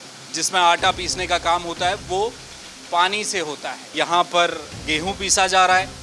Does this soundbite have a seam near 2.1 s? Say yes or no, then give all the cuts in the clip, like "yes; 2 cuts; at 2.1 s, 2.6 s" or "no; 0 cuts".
no; 1 cut; at 3.9 s